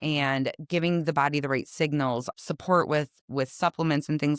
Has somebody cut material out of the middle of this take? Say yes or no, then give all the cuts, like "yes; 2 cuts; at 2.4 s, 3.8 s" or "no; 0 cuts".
yes; 1 cut; at 2.3 s